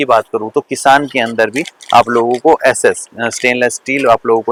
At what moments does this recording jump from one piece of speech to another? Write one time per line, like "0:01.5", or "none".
none